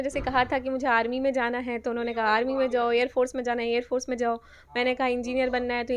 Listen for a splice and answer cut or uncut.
uncut